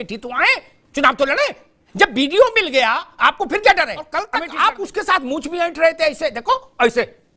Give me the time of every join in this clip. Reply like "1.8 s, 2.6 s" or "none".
4.3 s

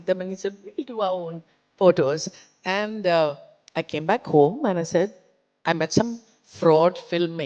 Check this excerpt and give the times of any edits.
none

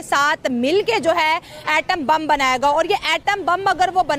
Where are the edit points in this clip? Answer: none

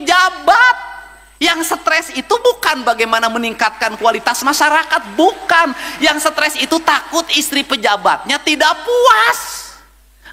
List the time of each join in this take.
none

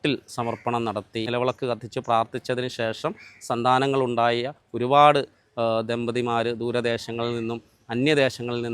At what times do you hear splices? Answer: 1.3 s

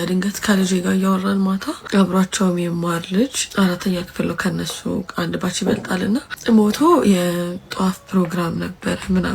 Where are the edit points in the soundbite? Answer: 1.8 s, 3.4 s, 6.3 s

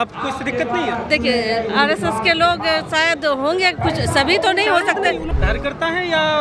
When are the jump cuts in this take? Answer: 5.3 s

